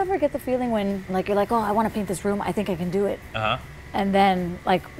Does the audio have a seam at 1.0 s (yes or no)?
yes